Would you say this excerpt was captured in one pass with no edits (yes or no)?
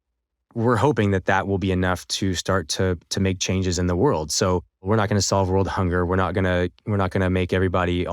no